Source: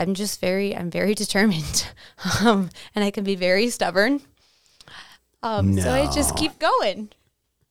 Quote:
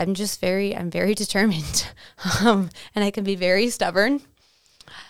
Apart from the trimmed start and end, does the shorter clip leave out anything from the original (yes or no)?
no